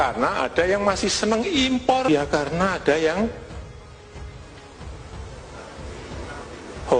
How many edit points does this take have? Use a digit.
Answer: 1